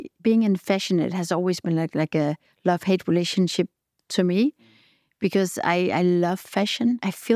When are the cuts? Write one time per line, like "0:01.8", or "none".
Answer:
none